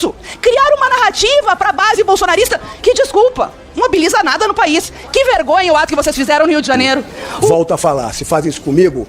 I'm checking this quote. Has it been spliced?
yes; 1 cut; at 7.5 s

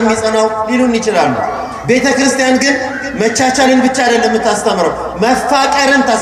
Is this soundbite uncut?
yes; 0 cuts

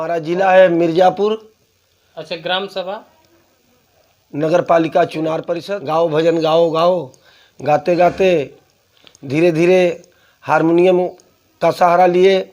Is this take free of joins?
no; 1 cut; at 5.5 s

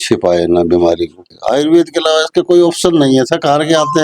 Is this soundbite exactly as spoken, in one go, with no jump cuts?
no; 1 cut; at 1.2 s

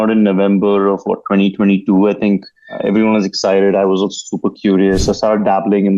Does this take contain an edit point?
yes; 1 cut; at 2.8 s

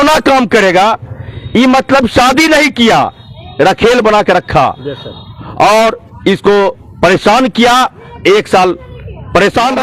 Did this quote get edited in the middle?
no; 0 cuts

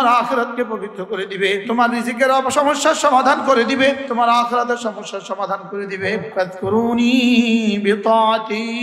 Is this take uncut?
no; 3 cuts; at 1.6 s, 4.0 s, 6.3 s

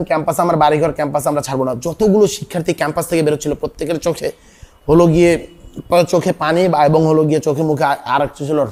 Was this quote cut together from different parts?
no; 0 cuts

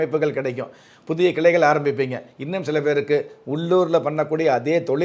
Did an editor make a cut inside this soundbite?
no; 0 cuts

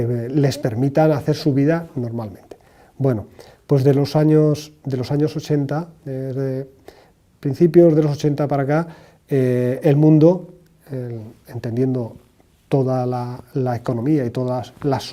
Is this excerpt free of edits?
yes; 0 cuts

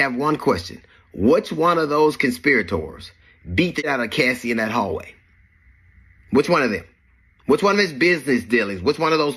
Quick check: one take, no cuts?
no; 1 cut; at 3.8 s

